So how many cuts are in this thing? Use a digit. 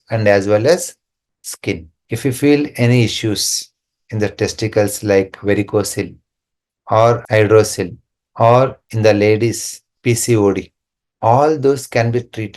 1